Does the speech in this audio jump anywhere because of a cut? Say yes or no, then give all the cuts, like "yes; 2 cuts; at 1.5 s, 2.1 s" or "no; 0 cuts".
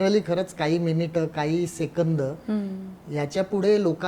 no; 0 cuts